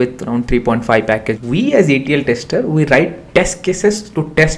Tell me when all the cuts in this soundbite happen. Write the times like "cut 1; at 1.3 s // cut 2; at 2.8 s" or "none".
cut 1; at 1.3 s